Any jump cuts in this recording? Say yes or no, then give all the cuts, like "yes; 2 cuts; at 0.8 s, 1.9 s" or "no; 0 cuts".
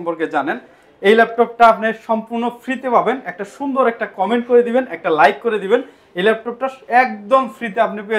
no; 0 cuts